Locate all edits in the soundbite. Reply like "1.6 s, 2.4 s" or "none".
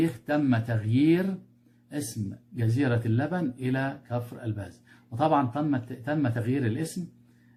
none